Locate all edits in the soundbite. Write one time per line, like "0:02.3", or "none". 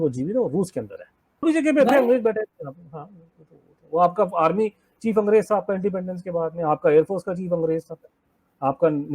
0:01.4